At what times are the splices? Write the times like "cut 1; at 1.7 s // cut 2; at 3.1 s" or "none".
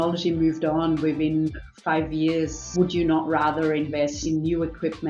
cut 1; at 2.6 s // cut 2; at 4.2 s